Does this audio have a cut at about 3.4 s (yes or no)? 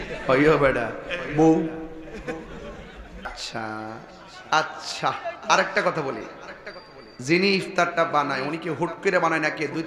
yes